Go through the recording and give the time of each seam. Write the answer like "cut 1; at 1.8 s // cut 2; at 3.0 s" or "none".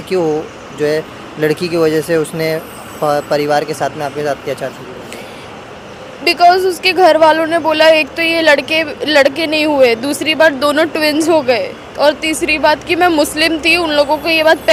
none